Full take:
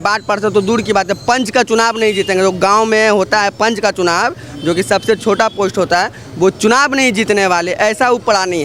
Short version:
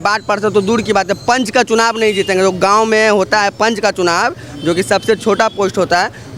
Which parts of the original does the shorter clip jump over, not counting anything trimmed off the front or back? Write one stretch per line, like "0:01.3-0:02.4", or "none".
none